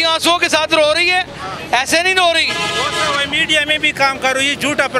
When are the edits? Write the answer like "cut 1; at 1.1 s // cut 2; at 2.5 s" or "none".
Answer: none